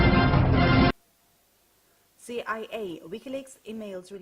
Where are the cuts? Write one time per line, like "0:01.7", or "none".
0:01.0